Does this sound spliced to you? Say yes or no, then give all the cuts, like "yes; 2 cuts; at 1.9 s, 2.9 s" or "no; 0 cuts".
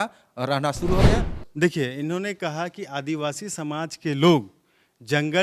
yes; 1 cut; at 1.1 s